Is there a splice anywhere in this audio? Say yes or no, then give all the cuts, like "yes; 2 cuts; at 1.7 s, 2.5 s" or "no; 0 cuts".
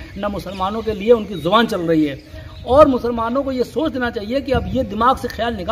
yes; 1 cut; at 2.5 s